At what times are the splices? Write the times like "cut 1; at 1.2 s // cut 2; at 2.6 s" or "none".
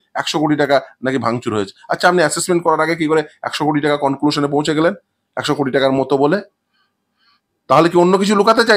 none